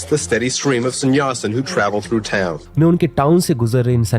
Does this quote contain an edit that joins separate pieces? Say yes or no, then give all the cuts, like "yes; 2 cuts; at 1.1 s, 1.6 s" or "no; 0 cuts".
no; 0 cuts